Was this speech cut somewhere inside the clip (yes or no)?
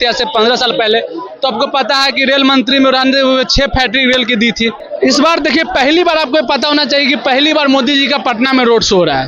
yes